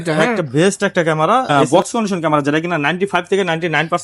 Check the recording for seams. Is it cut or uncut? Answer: cut